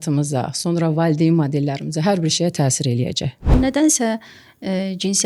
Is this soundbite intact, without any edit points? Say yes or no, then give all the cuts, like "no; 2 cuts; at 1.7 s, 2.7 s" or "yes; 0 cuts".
no; 1 cut; at 3.5 s